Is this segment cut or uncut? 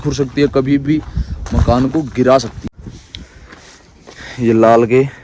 cut